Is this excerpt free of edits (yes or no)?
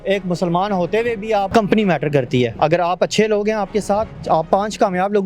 no